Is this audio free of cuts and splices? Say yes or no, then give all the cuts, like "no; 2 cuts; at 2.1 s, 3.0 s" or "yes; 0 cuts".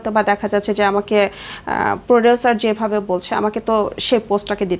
yes; 0 cuts